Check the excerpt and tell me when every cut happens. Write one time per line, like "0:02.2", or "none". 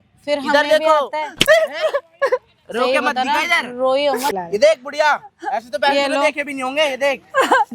0:04.3